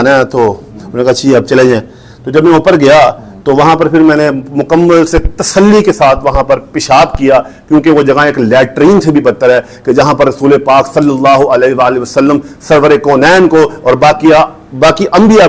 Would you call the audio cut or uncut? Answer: uncut